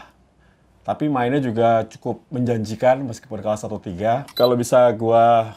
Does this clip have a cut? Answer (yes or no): yes